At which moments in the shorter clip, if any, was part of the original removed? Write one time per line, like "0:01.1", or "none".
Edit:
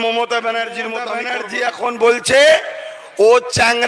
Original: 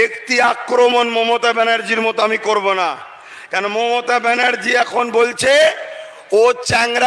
0:01.2